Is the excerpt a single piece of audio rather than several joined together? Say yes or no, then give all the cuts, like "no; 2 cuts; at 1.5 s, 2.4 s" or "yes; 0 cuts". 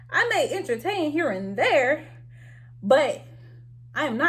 yes; 0 cuts